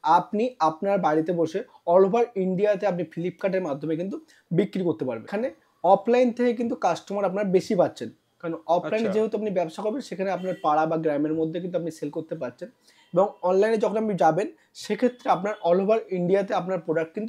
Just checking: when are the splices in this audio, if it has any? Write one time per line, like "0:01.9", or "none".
0:05.3